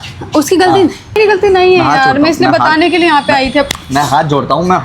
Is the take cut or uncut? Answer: cut